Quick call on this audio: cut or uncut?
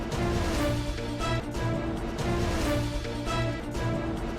uncut